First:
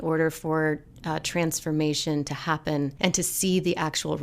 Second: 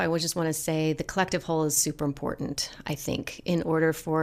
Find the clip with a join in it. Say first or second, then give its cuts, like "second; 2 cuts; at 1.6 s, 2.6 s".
first; 1 cut; at 2.9 s